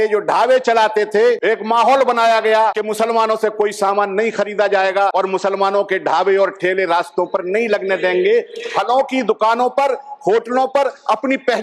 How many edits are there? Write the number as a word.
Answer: three